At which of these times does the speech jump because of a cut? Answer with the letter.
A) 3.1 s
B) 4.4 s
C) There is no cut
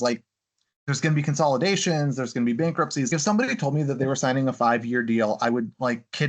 A